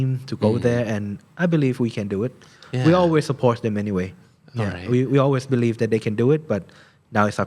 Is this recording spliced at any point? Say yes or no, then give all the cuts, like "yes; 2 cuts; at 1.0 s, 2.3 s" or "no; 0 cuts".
no; 0 cuts